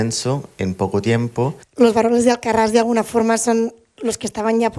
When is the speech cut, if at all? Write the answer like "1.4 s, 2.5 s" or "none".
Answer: 1.6 s